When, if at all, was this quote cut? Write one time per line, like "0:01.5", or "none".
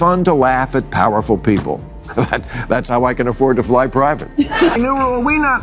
0:04.7